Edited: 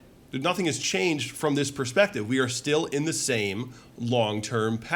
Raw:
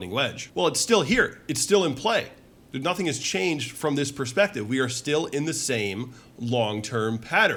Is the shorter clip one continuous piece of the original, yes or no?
yes